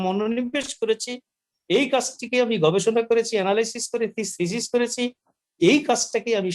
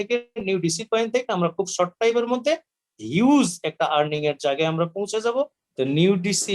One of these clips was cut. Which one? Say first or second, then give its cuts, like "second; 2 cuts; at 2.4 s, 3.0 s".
second; 1 cut; at 5.6 s